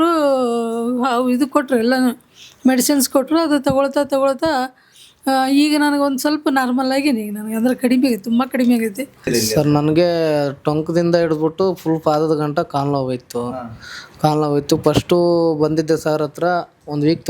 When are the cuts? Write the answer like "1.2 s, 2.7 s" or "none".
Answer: 9.3 s